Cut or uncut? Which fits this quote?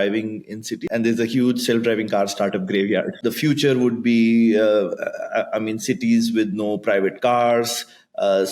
cut